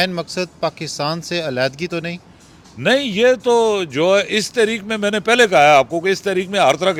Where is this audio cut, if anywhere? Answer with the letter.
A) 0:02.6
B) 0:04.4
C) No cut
C